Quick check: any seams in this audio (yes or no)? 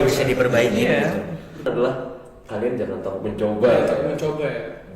yes